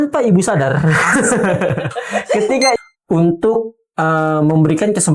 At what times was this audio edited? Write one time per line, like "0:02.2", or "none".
0:02.8